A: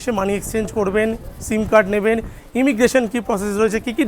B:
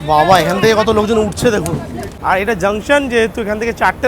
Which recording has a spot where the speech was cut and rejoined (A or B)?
B